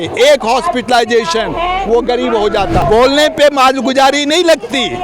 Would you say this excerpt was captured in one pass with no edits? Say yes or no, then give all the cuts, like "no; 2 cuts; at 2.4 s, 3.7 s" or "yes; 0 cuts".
no; 1 cut; at 2.8 s